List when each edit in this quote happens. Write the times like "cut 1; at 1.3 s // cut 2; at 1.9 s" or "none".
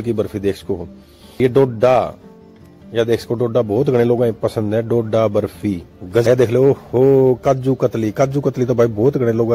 cut 1; at 1.4 s // cut 2; at 6.2 s